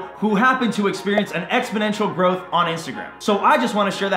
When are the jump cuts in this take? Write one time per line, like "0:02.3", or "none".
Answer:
none

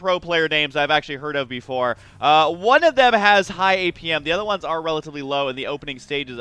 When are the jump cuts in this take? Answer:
0:04.7

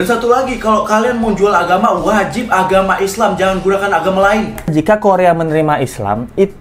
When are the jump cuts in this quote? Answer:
0:04.7

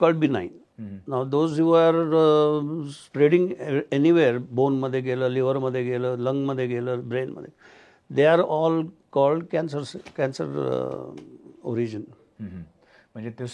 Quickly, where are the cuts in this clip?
none

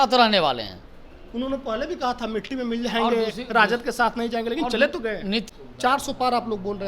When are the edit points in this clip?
0:05.5

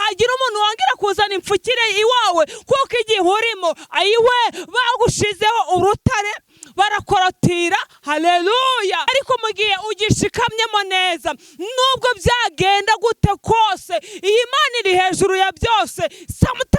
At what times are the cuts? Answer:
0:09.0

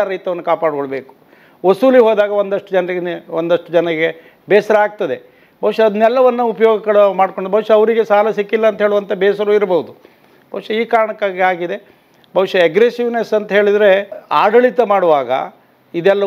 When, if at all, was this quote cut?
0:14.2

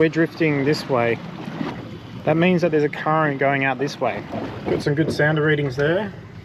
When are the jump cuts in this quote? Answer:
0:01.8
0:04.5

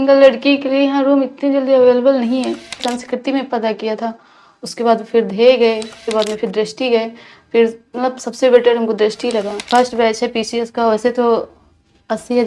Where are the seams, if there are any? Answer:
0:02.9
0:06.0
0:09.6

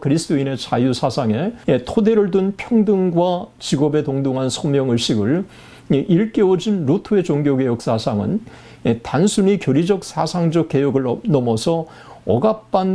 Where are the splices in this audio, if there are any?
0:01.6

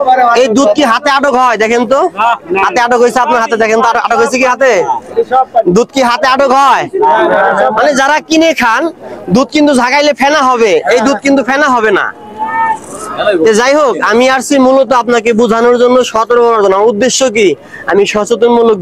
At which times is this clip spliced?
none

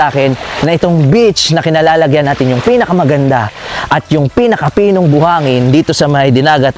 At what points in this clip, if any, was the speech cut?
none

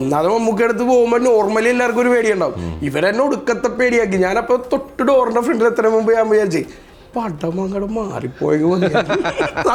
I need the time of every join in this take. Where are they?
none

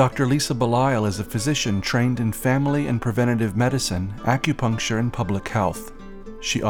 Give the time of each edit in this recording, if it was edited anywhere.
none

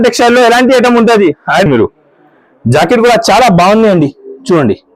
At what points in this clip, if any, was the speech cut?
0:01.7

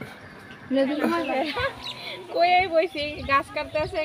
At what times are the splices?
0:01.3

